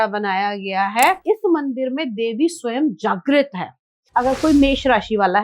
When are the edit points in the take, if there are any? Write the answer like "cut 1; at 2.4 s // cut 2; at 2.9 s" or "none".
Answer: cut 1; at 1.2 s // cut 2; at 4.1 s